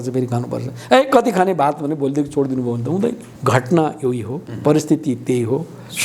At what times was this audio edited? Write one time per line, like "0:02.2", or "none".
0:03.3